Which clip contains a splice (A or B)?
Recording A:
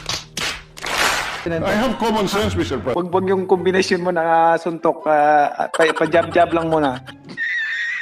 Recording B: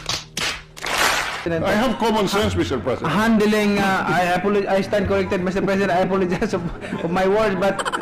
A